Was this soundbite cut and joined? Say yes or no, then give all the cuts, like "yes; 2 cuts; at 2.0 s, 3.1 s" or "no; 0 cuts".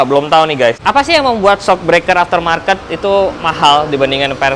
yes; 2 cuts; at 0.8 s, 3.4 s